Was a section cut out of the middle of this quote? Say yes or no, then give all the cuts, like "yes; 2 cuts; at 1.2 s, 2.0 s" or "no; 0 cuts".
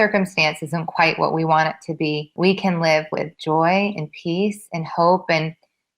yes; 1 cut; at 2.3 s